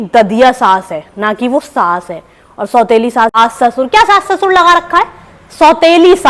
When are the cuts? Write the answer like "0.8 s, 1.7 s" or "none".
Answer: 3.3 s